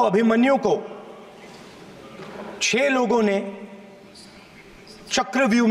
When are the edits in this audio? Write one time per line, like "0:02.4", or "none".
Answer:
none